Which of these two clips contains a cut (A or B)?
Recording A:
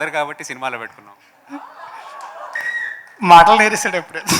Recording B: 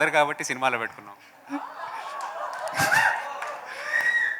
A